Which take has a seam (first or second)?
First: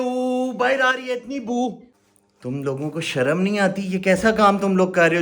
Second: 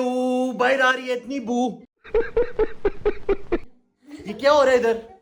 first